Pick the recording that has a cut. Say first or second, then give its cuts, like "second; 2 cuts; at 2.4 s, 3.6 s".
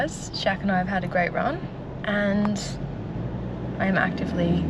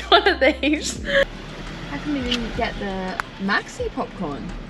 second; 1 cut; at 1.2 s